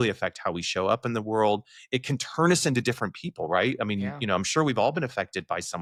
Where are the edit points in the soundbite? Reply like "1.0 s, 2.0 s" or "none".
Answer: none